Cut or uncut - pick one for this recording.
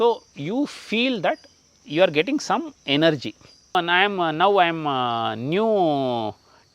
cut